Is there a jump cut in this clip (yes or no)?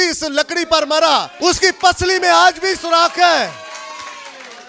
yes